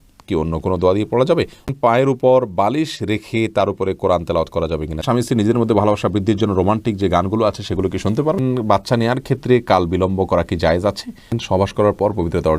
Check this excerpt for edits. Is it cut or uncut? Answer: cut